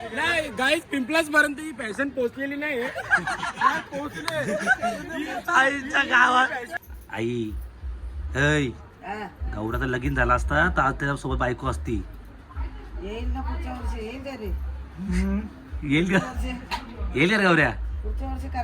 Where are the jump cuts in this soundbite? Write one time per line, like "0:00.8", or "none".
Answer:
0:06.7